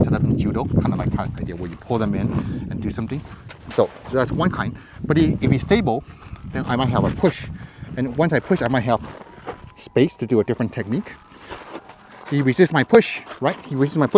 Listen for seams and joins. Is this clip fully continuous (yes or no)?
yes